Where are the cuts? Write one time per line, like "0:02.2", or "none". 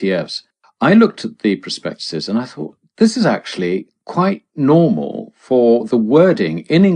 0:02.6